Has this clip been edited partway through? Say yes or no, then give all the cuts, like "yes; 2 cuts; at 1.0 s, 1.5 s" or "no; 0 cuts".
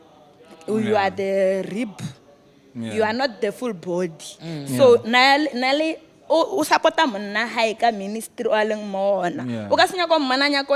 no; 0 cuts